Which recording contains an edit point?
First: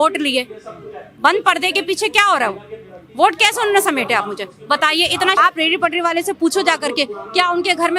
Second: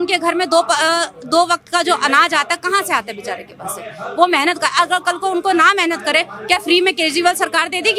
first; 1 cut; at 5.4 s

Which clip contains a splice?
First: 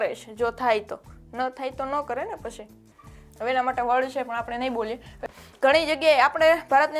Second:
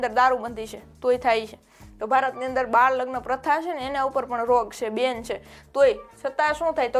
first; 1 cut; at 5.2 s

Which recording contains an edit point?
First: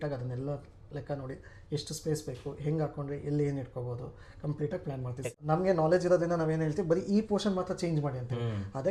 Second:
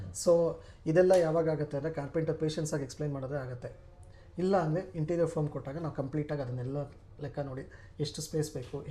first; 1 cut; at 5.3 s

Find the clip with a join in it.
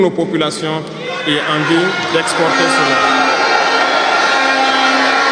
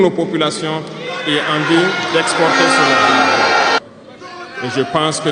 second; 1 cut; at 3.8 s

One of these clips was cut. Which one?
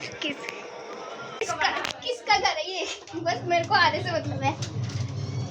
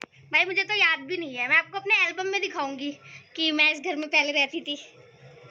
first; 1 cut; at 1.4 s

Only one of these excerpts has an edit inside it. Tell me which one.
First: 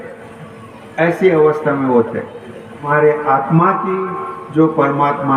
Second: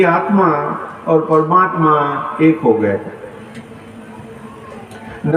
first; 1 cut; at 2.9 s

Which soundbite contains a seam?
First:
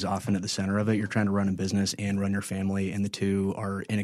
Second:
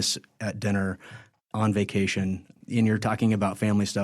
second; 1 cut; at 2.5 s

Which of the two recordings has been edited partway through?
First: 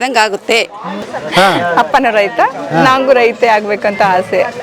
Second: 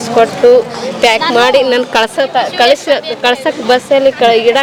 first; 1 cut; at 1.0 s

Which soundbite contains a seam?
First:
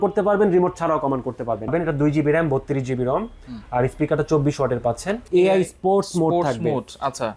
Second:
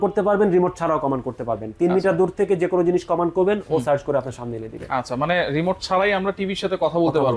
first; 2 cuts; at 1.7 s, 5.3 s

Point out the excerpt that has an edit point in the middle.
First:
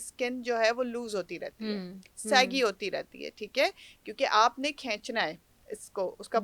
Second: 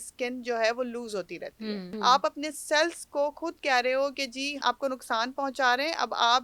second; 1 cut; at 1.9 s

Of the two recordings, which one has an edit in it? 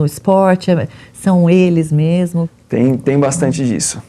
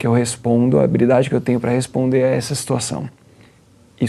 first; 1 cut; at 2.6 s

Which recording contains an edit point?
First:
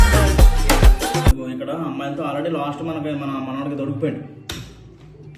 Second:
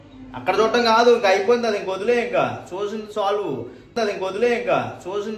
first; 1 cut; at 1.3 s

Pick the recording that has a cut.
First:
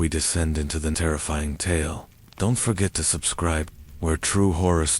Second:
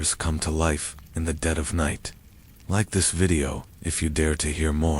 first; 2 cuts; at 0.9 s, 3.7 s

